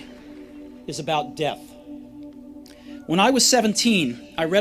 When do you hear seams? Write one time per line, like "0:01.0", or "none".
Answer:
0:01.6
0:03.0